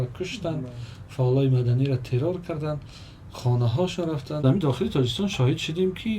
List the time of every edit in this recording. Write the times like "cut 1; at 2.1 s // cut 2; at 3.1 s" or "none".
cut 1; at 4.4 s